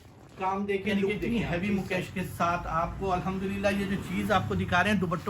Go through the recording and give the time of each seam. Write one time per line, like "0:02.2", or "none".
0:01.2